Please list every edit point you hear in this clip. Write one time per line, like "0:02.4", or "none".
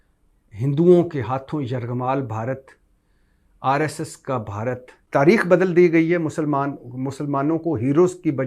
0:04.9

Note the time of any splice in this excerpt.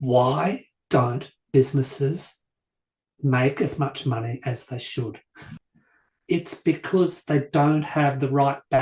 0:05.4

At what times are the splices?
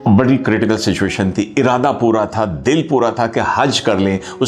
none

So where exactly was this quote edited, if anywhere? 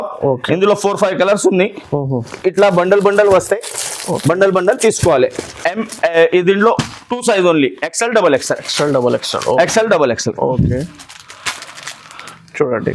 none

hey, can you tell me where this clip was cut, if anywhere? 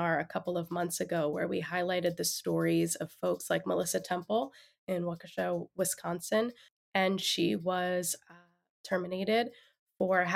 0:06.7

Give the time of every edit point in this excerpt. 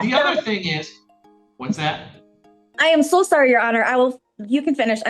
none

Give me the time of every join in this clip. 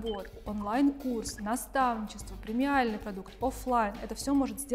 none

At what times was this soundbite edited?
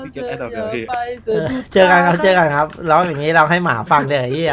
none

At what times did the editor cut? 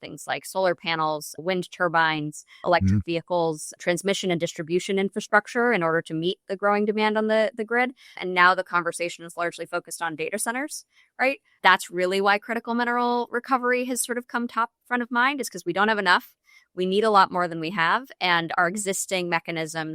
0:11.5

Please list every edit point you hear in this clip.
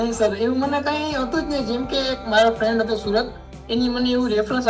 none

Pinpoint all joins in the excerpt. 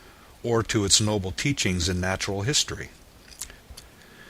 0:02.7

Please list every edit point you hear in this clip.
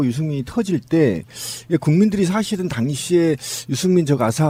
none

